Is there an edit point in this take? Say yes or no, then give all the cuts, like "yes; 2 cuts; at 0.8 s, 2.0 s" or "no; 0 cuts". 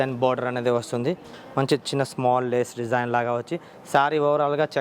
no; 0 cuts